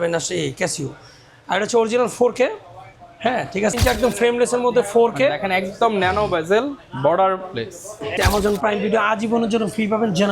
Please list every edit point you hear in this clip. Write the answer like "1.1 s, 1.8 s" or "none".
3.7 s, 8.1 s